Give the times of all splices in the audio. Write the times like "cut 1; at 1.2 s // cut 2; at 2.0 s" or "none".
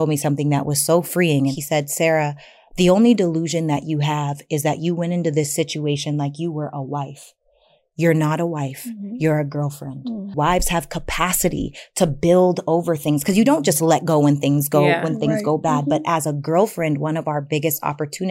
cut 1; at 1.6 s // cut 2; at 10.3 s